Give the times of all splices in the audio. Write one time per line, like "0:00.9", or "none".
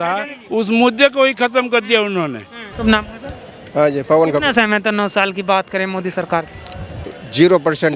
0:02.6